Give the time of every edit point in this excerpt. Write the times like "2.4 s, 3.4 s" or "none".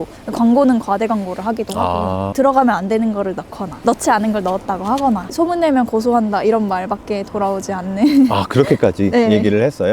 2.3 s, 5.3 s